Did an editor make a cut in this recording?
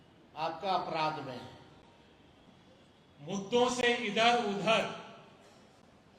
yes; 1 cut; at 2.4 s

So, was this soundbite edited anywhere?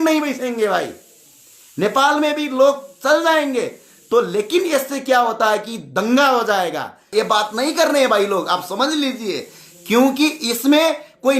yes; 1 cut; at 7.1 s

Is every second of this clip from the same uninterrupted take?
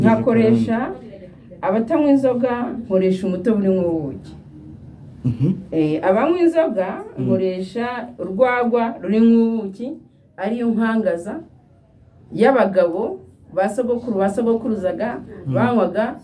yes; 0 cuts

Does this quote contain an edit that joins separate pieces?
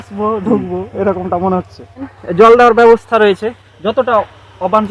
yes; 2 cuts; at 2.2 s, 3.7 s

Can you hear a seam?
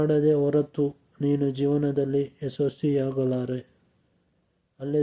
no; 0 cuts

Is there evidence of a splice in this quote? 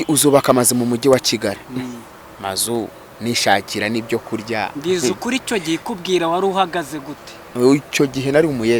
no; 0 cuts

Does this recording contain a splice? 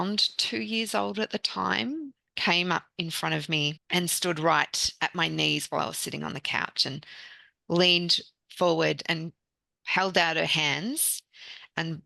yes; 1 cut; at 3.8 s

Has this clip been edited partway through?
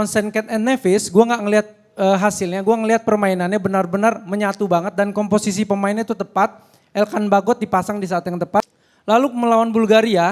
yes; 1 cut; at 8.7 s

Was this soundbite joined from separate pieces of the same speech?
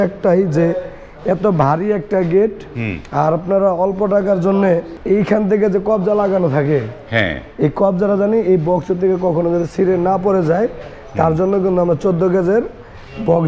yes; 1 cut; at 4.9 s

